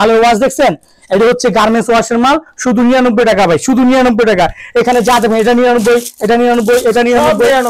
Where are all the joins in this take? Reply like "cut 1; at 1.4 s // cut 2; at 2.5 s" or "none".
none